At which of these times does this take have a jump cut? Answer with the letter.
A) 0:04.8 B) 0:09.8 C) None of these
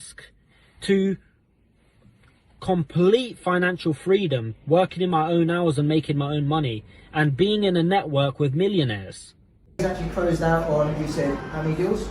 B